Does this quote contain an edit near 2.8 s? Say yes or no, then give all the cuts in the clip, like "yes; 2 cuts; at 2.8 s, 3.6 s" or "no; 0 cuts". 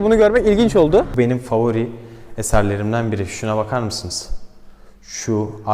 no; 1 cut; at 1.1 s